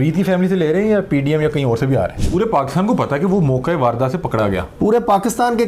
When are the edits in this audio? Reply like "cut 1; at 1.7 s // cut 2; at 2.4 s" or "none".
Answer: cut 1; at 2.2 s